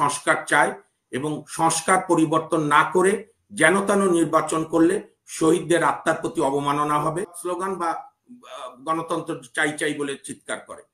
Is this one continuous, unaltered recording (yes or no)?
no